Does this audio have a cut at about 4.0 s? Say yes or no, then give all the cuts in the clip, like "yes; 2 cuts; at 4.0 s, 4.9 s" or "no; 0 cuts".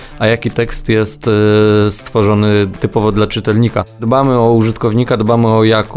yes; 1 cut; at 4.0 s